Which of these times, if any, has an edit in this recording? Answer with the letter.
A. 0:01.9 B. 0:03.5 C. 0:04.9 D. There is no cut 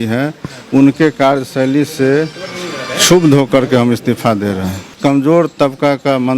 C